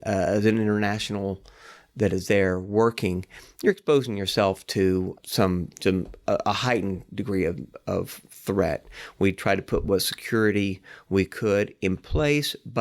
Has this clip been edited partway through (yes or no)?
no